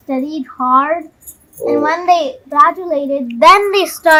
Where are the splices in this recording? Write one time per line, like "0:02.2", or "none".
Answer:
none